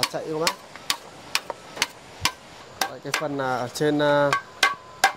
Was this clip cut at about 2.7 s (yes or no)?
yes